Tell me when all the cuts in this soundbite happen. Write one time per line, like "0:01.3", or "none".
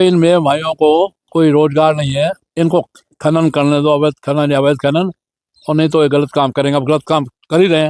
0:01.2
0:02.4